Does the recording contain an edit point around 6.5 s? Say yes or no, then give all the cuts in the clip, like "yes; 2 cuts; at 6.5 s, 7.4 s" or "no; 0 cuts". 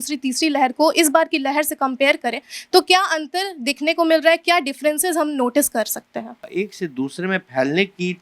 yes; 1 cut; at 6.5 s